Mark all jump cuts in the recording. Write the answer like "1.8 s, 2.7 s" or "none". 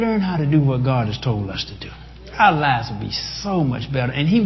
none